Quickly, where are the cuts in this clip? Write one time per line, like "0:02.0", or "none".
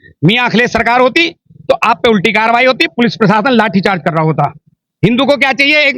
0:04.8